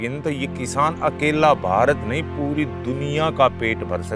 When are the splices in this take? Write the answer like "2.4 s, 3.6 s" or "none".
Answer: none